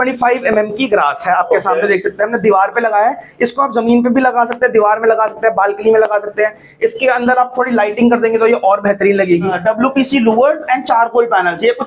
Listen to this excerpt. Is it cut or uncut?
cut